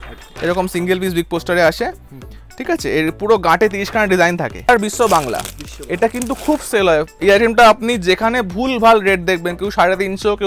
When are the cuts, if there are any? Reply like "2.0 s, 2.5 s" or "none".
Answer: 4.7 s